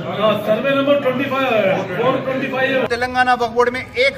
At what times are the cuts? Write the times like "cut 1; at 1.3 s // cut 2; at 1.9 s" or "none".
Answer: cut 1; at 2.9 s